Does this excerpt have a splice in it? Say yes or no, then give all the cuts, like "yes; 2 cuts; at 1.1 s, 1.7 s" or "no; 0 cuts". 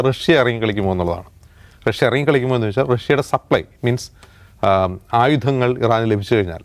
no; 0 cuts